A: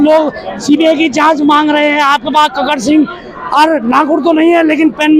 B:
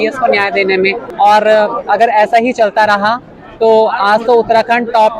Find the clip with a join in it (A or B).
B